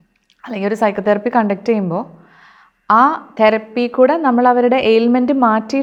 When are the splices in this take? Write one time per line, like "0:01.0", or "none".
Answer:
none

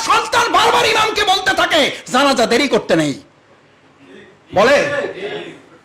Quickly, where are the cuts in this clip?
none

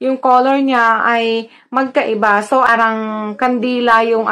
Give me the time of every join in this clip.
0:02.5

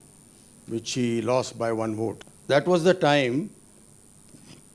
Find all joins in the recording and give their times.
0:02.3

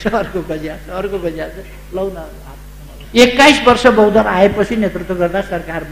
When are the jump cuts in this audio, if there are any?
0:03.0

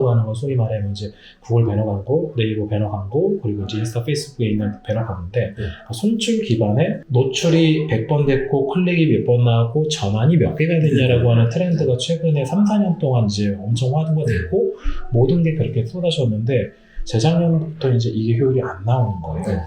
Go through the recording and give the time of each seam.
0:07.0

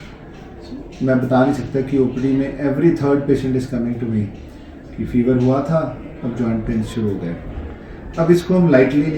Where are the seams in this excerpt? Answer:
none

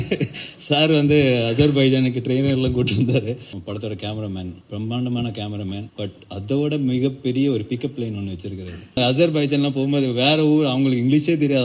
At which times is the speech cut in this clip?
0:03.5
0:04.6
0:05.9
0:09.0

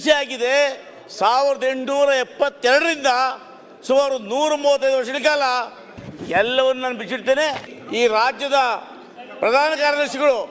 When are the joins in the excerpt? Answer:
0:07.8

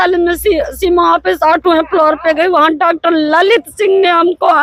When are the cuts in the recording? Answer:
none

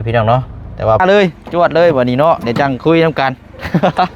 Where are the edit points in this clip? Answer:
0:01.0

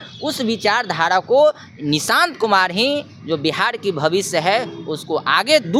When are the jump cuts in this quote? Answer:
none

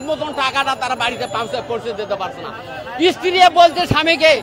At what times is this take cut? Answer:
none

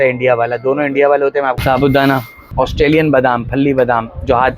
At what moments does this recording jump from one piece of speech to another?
0:01.6
0:02.4

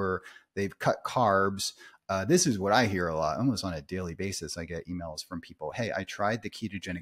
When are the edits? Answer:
none

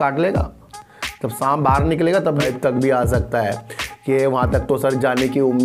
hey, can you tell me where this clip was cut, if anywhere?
0:02.3

